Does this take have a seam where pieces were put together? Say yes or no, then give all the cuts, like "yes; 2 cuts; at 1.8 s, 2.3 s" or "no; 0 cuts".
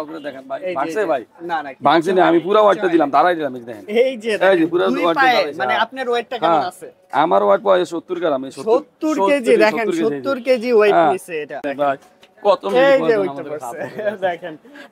no; 0 cuts